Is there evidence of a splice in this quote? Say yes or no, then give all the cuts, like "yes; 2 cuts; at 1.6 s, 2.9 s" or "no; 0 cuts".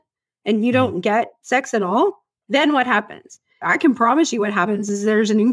yes; 2 cuts; at 2.3 s, 3.6 s